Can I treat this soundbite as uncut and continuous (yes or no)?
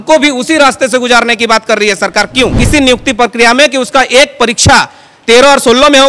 no